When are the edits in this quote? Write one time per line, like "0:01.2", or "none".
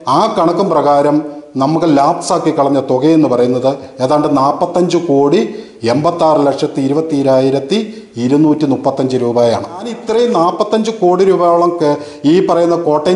0:10.0